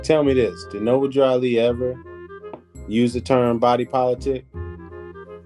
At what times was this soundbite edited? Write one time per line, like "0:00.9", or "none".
0:04.5